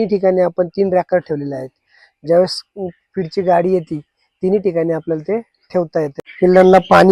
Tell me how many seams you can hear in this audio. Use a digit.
1